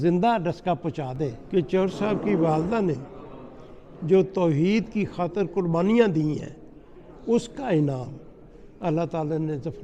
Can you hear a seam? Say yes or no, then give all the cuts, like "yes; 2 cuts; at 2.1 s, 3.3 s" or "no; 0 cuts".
yes; 1 cut; at 1.4 s